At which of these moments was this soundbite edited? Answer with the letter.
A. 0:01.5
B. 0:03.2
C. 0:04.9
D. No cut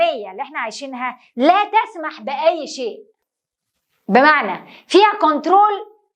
D